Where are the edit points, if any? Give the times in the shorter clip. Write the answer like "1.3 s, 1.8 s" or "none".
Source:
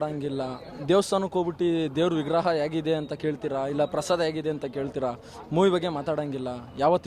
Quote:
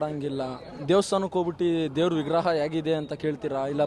none